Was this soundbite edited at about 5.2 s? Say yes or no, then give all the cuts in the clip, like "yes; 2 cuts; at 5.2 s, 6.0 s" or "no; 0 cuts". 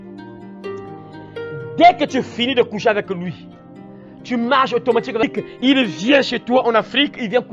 yes; 1 cut; at 5.2 s